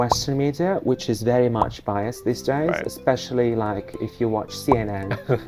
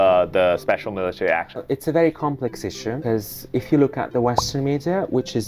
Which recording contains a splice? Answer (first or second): second